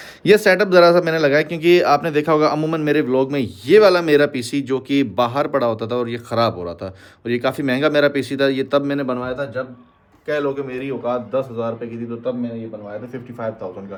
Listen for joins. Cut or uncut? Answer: uncut